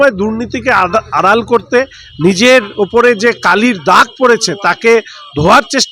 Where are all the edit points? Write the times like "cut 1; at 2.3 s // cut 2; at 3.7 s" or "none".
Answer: none